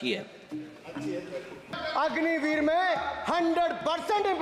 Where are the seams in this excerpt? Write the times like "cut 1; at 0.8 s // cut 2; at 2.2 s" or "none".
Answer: cut 1; at 1.8 s